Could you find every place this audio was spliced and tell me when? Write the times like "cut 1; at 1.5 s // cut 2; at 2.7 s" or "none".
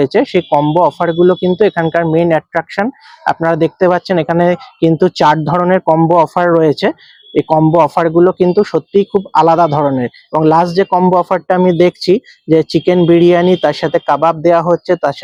none